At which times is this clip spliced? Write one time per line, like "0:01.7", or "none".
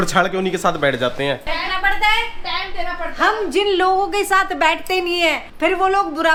none